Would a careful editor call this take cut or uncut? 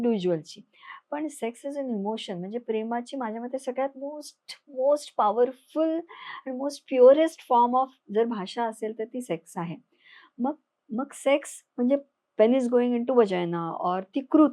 uncut